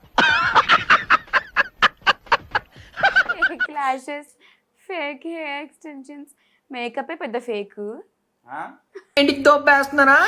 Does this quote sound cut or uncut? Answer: cut